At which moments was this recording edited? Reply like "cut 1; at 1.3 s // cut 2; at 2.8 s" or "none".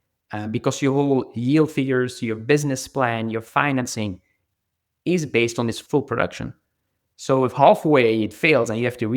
cut 1; at 5.8 s